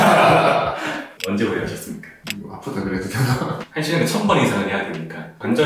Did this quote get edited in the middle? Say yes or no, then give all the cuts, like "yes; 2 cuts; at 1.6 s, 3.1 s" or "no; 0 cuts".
yes; 2 cuts; at 1.1 s, 3.6 s